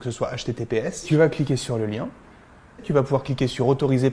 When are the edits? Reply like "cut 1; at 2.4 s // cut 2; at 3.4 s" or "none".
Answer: cut 1; at 1.0 s // cut 2; at 2.9 s